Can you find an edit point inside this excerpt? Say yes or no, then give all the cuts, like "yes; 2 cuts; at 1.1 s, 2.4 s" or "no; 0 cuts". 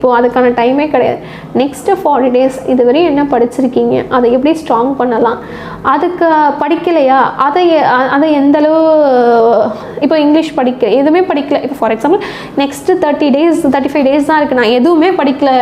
no; 0 cuts